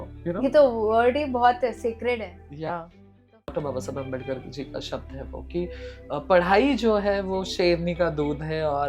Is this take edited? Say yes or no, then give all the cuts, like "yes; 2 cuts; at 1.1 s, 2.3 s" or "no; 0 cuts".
yes; 1 cut; at 3.5 s